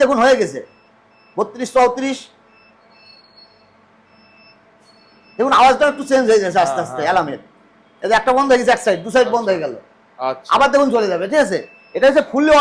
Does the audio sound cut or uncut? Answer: uncut